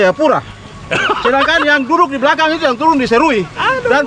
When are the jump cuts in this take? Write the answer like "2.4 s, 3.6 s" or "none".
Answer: none